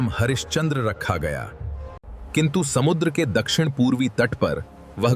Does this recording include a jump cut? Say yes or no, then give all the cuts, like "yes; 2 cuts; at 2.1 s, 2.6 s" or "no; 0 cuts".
yes; 1 cut; at 2.2 s